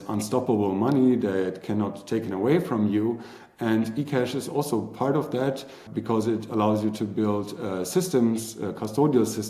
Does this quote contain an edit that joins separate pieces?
yes; 1 cut; at 5.9 s

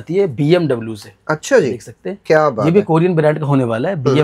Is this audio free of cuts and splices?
yes; 0 cuts

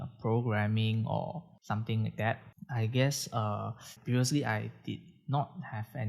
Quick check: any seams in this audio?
yes; 1 cut; at 3.9 s

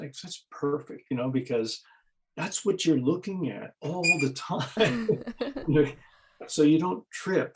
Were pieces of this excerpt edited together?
no; 0 cuts

